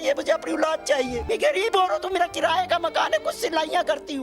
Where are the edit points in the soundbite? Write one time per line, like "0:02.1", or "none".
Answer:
0:01.2

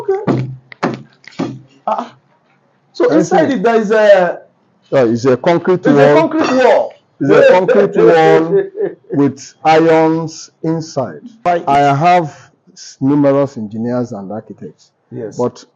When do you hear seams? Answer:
0:11.5

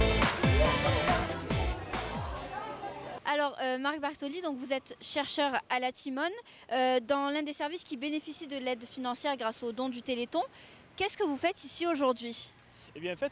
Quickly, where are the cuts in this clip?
0:06.0

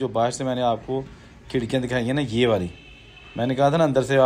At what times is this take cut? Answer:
none

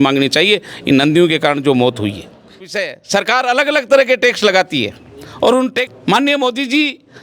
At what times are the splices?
0:02.5
0:05.9

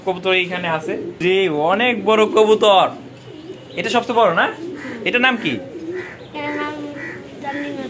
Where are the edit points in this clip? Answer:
0:01.2

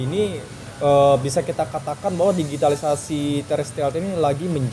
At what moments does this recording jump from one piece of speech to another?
none

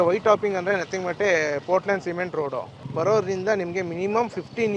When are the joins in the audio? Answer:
0:02.8

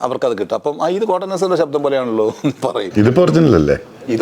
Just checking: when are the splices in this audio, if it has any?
0:02.8

